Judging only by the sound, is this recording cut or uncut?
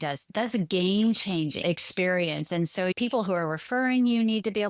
cut